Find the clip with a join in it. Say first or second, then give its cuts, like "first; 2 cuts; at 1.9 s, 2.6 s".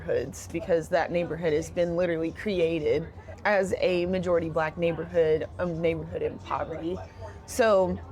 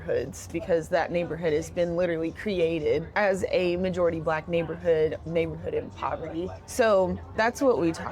second; 3 cuts; at 3.1 s, 5.2 s, 6.6 s